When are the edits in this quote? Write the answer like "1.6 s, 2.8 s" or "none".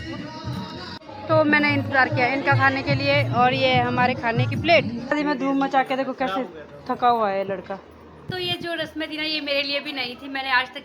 1.0 s, 5.2 s, 8.1 s